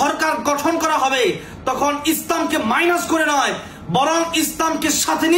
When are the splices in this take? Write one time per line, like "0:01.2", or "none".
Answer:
none